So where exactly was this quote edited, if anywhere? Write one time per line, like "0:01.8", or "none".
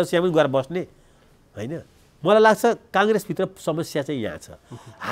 0:02.0